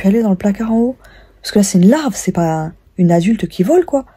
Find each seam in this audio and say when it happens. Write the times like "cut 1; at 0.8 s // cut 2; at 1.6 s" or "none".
none